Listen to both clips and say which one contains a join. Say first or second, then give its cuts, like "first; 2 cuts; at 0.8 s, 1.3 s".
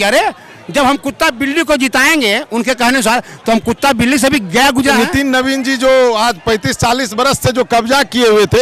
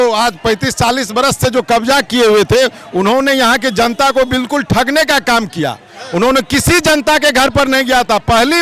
first; 1 cut; at 5.0 s